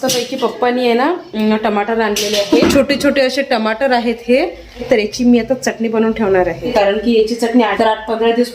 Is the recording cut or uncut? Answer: cut